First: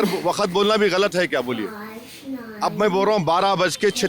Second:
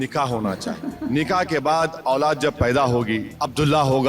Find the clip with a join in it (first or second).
second